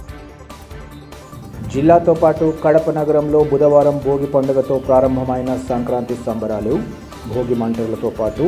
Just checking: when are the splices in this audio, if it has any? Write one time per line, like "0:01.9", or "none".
0:01.2